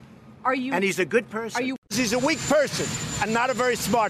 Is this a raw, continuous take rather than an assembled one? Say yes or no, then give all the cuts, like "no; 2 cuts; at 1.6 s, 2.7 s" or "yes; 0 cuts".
no; 1 cut; at 1.9 s